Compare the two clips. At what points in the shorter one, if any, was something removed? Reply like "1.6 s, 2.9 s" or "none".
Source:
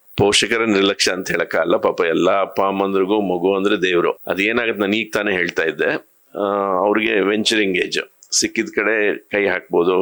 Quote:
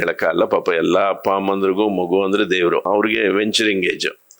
2.9 s